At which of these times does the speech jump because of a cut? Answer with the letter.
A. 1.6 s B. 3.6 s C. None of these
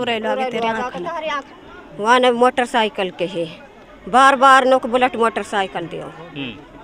A